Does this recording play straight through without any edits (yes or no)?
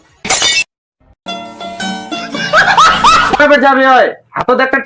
no